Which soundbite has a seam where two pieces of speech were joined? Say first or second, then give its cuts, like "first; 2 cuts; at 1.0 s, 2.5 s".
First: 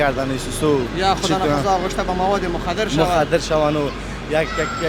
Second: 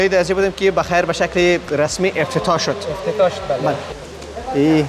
second; 1 cut; at 3.8 s